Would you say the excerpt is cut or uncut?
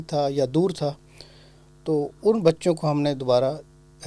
uncut